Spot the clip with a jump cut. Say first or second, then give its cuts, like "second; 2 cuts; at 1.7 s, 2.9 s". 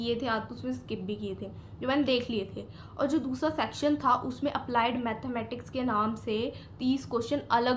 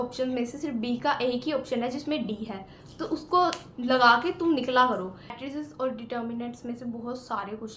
second; 1 cut; at 5.4 s